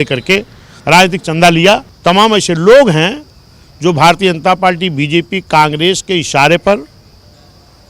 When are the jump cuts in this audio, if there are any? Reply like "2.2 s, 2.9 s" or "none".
1.9 s